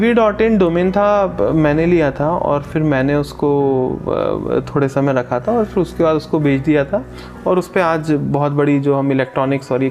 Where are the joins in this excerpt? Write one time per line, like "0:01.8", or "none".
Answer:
none